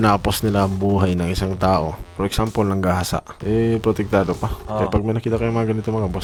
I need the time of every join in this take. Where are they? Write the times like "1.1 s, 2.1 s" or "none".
none